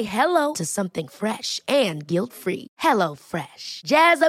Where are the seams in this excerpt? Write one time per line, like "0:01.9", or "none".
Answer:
none